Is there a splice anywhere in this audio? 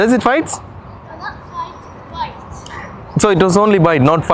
no; 0 cuts

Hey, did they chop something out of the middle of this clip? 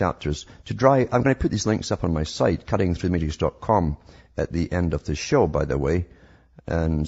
yes; 1 cut; at 3.3 s

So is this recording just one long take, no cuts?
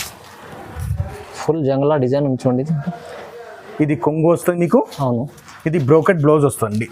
yes; 0 cuts

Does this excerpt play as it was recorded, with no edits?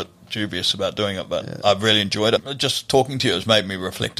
no; 1 cut; at 2.5 s

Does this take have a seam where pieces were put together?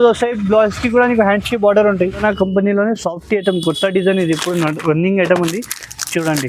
yes; 1 cut; at 2.2 s

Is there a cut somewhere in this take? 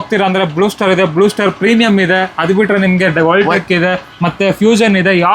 no; 0 cuts

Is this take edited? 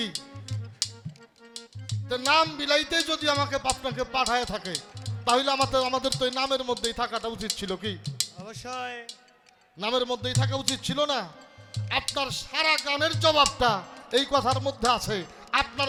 no; 0 cuts

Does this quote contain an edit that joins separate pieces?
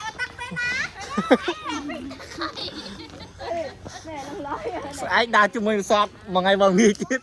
no; 0 cuts

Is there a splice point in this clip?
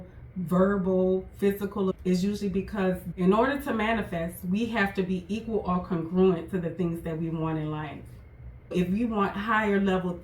yes; 3 cuts; at 1.9 s, 3.1 s, 8.7 s

